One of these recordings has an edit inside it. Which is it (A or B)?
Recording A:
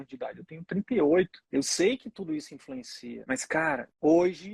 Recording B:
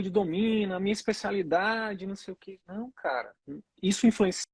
A